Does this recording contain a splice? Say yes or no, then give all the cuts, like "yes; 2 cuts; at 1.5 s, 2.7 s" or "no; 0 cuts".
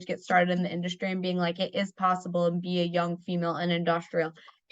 no; 0 cuts